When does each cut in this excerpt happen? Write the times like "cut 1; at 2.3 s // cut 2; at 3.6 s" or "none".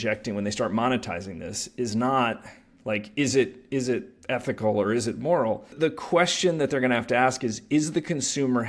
cut 1; at 5.7 s